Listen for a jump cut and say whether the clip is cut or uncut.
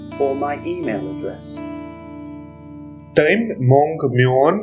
cut